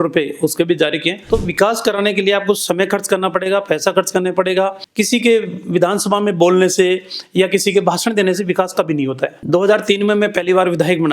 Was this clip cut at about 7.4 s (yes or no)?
no